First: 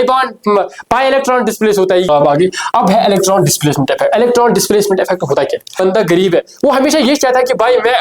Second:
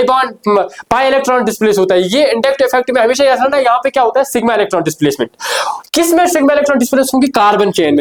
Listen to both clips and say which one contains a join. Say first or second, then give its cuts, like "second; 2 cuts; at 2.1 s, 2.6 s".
first; 2 cuts; at 2.1 s, 5.8 s